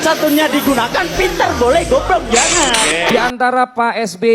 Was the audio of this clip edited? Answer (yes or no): yes